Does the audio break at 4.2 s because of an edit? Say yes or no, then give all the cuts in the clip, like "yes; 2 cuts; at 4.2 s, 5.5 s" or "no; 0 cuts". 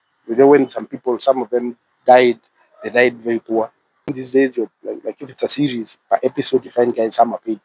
yes; 1 cut; at 4.2 s